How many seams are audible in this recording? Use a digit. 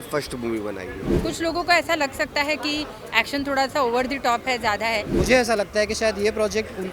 2